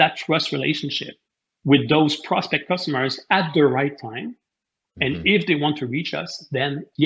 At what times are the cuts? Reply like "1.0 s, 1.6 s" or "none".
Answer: none